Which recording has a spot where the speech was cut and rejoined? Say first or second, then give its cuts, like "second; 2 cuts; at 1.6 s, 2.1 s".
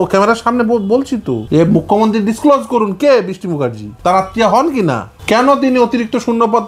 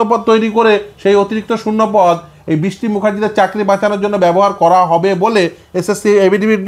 first; 3 cuts; at 1.4 s, 3.9 s, 5.1 s